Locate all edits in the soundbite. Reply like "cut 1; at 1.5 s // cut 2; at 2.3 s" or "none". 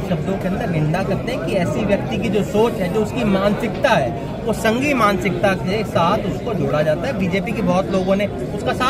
none

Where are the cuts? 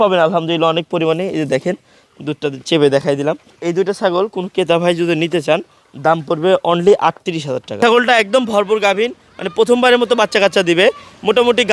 cut 1; at 3.5 s // cut 2; at 7.8 s

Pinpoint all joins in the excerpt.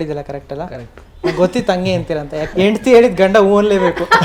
cut 1; at 2.5 s

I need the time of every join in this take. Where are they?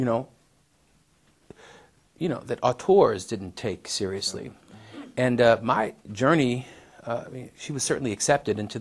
cut 1; at 4.5 s

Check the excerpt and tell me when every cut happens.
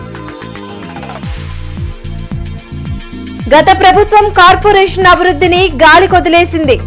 cut 1; at 3.3 s

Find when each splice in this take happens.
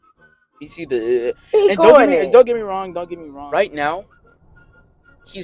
cut 1; at 3.3 s

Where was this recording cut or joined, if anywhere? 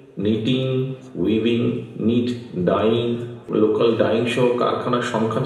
cut 1; at 3.5 s

